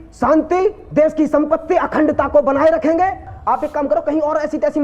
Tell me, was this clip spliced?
yes; 1 cut; at 3.3 s

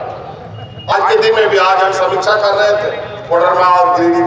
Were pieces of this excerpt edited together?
yes; 1 cut; at 0.9 s

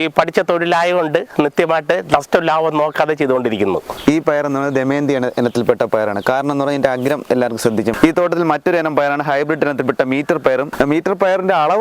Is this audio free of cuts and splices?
no; 3 cuts; at 3.9 s, 8.0 s, 10.7 s

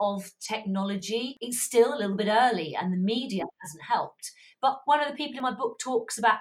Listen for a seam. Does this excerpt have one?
yes; 2 cuts; at 1.4 s, 4.5 s

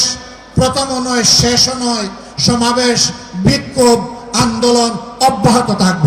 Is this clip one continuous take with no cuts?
yes; 0 cuts

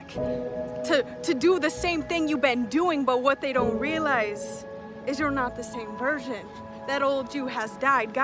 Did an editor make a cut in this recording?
no; 0 cuts

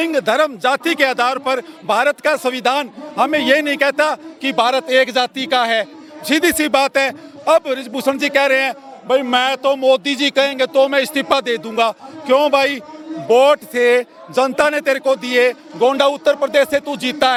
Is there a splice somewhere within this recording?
no; 0 cuts

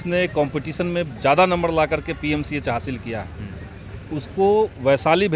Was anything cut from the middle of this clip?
no; 0 cuts

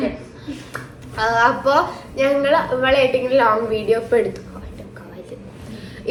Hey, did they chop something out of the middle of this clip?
no; 0 cuts

